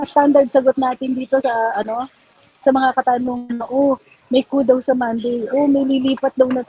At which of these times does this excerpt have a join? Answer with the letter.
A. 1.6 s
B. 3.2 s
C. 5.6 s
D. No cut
D